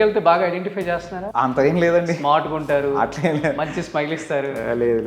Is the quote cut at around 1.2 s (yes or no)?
yes